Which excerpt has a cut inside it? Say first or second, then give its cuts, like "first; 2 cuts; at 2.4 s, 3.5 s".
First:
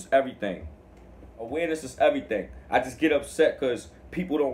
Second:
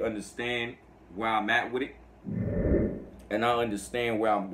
first; 1 cut; at 1.5 s